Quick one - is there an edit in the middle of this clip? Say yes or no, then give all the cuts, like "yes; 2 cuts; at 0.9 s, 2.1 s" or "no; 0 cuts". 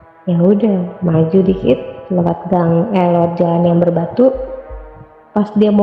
no; 0 cuts